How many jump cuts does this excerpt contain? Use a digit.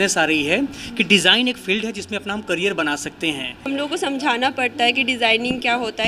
1